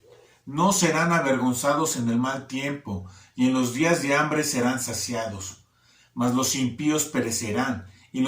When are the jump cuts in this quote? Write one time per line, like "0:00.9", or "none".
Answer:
none